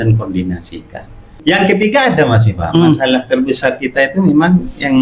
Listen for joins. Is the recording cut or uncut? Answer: cut